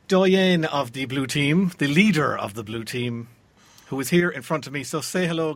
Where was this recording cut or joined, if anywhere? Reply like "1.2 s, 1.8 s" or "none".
none

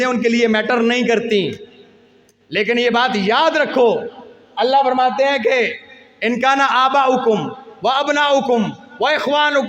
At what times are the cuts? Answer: none

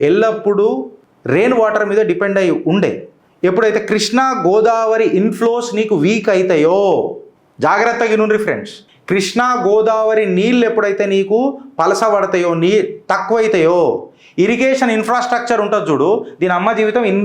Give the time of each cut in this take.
none

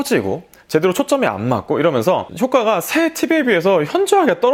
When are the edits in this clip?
none

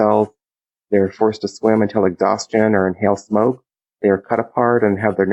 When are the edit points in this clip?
3.9 s

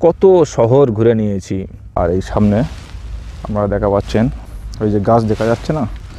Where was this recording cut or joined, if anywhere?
1.8 s, 4.4 s

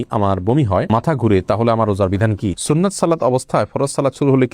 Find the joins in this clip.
2.6 s

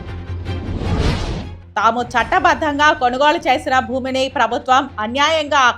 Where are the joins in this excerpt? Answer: 1.6 s

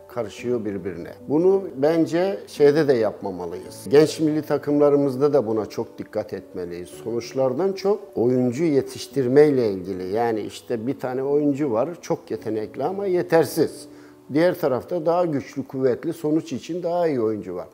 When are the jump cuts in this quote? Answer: none

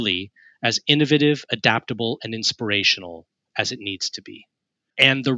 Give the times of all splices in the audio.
4.2 s

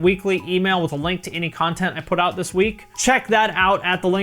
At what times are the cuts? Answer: 2.9 s

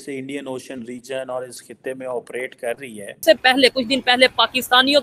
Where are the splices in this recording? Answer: 3.2 s

